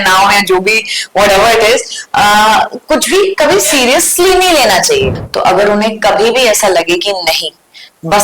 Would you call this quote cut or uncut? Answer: cut